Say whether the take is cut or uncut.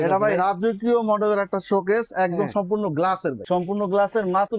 uncut